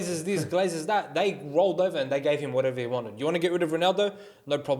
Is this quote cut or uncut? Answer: uncut